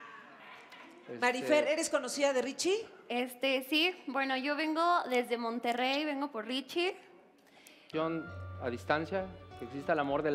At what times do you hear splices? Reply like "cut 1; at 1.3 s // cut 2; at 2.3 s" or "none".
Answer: none